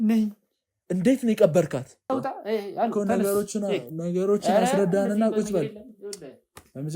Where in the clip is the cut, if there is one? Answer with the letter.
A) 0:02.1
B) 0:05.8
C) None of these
A